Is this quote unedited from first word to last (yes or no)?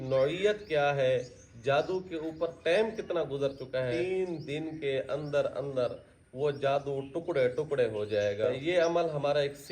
no